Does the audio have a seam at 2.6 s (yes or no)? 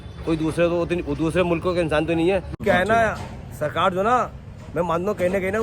yes